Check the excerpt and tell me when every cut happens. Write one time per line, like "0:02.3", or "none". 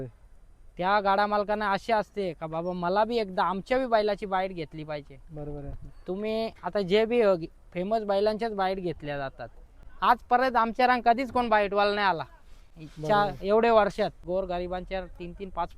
0:14.2